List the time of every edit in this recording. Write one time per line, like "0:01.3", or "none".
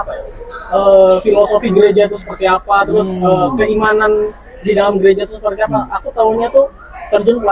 none